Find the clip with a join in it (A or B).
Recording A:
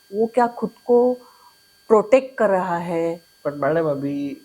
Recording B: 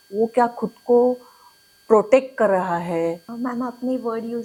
A